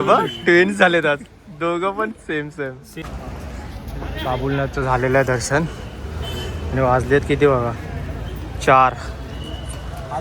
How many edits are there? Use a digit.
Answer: 1